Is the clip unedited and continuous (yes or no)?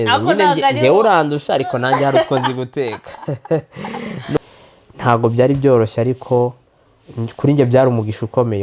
no